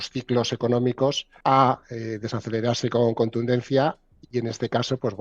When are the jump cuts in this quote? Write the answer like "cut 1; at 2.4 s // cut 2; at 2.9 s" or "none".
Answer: cut 1; at 1.3 s